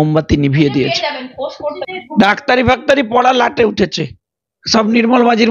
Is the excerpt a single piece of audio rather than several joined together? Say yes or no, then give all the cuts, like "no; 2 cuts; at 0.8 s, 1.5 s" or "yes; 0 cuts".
no; 1 cut; at 1.8 s